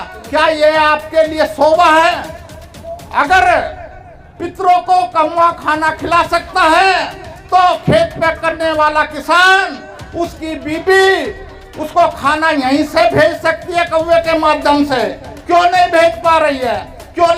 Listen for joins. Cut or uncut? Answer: cut